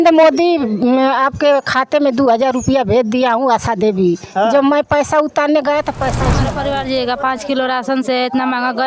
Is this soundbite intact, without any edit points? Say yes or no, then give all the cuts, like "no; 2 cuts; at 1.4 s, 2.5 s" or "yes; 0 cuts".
no; 1 cut; at 6.4 s